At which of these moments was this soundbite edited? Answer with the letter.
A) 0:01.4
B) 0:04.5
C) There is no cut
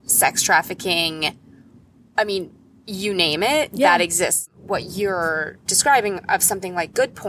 B